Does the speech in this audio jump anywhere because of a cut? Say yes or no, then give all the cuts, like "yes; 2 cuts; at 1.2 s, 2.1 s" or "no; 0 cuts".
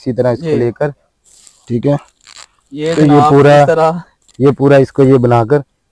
no; 0 cuts